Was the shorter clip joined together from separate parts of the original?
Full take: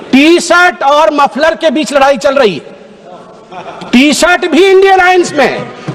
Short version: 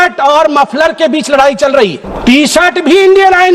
yes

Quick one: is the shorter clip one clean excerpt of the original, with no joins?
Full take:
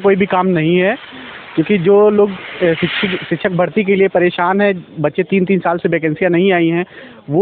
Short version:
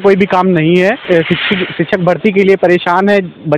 no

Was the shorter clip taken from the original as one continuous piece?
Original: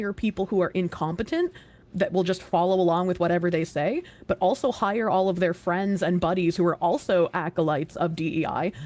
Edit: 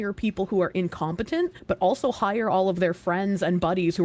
no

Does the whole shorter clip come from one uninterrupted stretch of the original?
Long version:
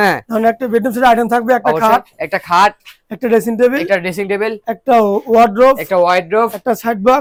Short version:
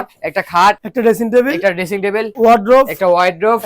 no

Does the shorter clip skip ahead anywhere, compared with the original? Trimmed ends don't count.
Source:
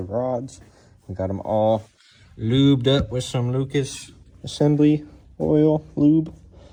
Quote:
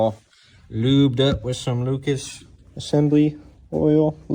no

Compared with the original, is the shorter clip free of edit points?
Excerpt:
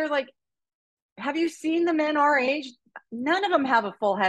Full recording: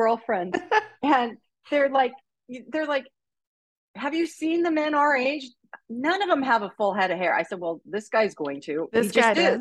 yes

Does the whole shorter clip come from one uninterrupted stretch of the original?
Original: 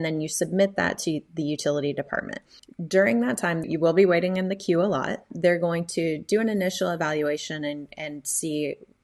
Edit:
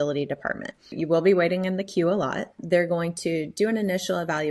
no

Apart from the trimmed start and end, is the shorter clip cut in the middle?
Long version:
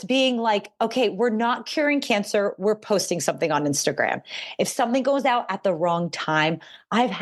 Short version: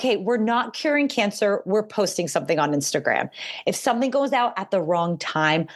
no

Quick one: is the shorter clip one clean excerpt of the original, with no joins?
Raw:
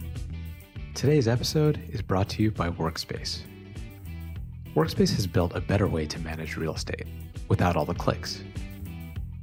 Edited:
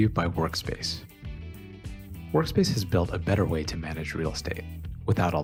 yes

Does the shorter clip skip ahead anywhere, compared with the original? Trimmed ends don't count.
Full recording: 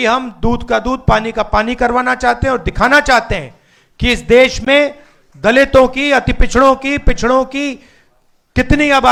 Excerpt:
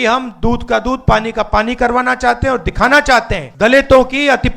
yes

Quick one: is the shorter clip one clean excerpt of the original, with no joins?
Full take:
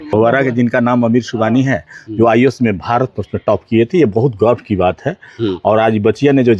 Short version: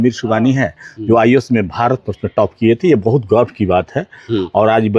yes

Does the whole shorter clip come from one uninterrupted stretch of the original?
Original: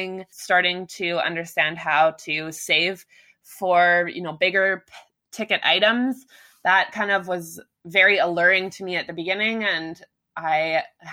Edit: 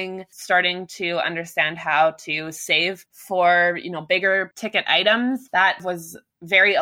no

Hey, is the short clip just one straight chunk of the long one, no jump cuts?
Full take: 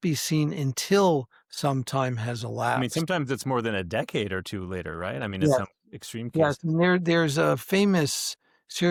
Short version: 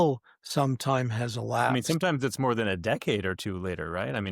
yes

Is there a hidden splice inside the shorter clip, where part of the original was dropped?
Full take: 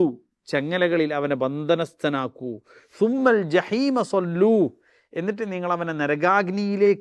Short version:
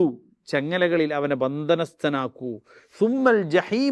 no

